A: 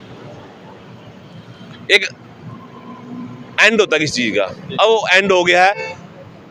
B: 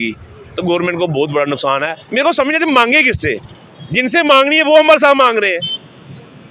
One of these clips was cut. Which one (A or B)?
B